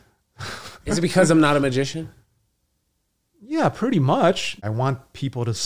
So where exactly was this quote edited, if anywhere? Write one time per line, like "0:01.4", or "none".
0:04.6